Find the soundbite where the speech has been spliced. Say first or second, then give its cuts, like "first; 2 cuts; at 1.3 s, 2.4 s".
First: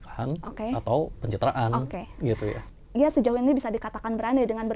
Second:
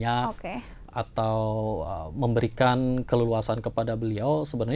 first; 1 cut; at 2.6 s